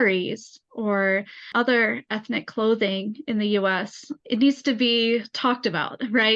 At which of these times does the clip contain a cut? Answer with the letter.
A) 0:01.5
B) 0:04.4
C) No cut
C